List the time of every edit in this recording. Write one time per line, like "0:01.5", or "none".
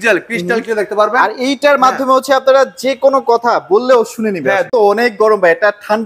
0:04.7

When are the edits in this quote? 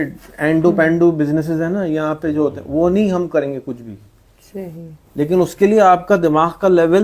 none

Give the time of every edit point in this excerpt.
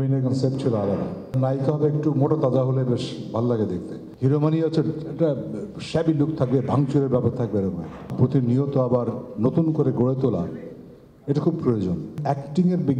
0:01.4
0:04.0
0:08.1
0:12.1

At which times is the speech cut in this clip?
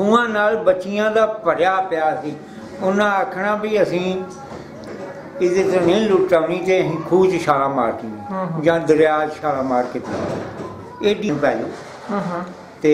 0:11.3

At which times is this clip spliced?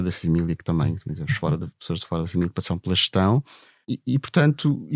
0:03.9

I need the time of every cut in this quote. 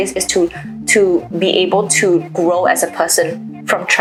none

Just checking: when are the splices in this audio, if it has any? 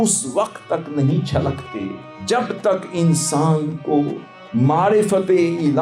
0:02.1

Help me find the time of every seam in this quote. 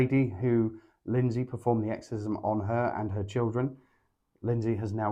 none

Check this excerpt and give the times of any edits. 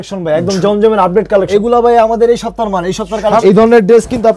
0:01.5
0:03.4

